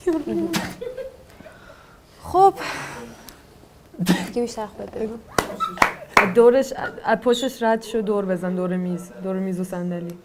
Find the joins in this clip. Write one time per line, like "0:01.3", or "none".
none